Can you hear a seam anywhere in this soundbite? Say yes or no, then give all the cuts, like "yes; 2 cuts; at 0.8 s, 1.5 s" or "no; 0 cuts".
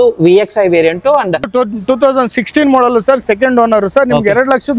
yes; 1 cut; at 1.5 s